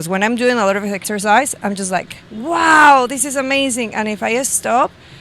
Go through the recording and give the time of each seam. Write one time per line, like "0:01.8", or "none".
0:01.0